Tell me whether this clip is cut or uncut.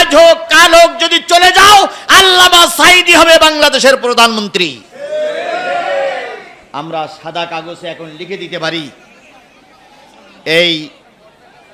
uncut